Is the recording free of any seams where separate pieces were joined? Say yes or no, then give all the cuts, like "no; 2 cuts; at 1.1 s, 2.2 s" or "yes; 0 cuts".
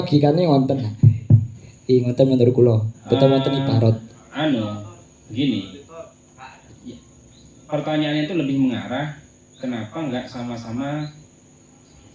yes; 0 cuts